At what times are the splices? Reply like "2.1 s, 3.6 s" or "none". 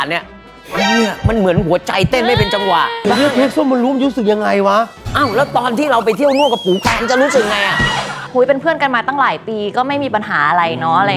3.1 s, 8.2 s